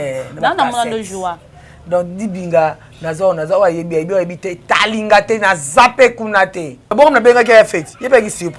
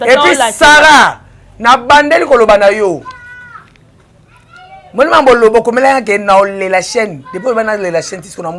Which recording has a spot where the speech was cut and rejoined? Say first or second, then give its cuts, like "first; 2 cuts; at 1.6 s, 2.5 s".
first; 1 cut; at 6.8 s